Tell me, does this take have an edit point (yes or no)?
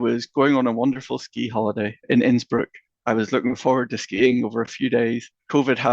yes